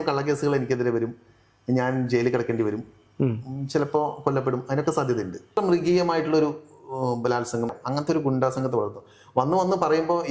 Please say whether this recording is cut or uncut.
cut